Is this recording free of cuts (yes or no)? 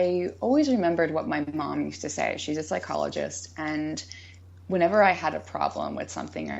yes